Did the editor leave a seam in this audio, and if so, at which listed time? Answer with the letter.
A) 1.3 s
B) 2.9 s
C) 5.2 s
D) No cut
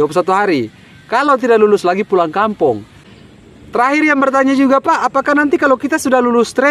B